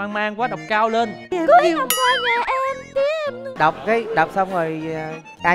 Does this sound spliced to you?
yes; 2 cuts; at 1.3 s, 3.6 s

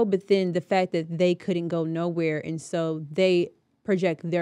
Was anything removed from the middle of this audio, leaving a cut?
no; 0 cuts

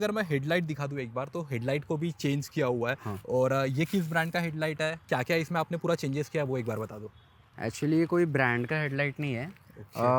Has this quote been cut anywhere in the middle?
no; 0 cuts

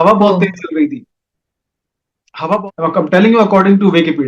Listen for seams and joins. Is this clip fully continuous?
no; 1 cut; at 2.6 s

